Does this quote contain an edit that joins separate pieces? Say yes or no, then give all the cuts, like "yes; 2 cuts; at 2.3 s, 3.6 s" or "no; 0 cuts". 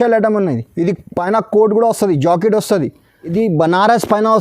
yes; 1 cut; at 3.2 s